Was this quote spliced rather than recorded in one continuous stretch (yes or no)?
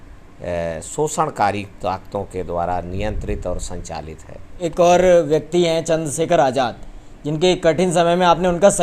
yes